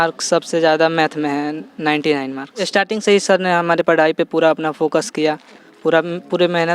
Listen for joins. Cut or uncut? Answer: cut